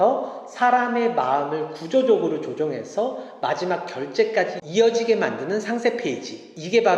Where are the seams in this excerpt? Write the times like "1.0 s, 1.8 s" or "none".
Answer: none